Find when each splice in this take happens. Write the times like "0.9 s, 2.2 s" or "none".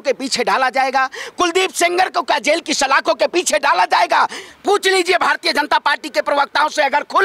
4.4 s